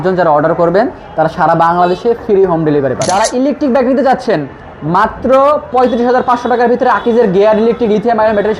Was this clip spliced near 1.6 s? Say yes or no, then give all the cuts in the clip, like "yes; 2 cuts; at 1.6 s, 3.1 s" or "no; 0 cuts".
no; 1 cut; at 3.0 s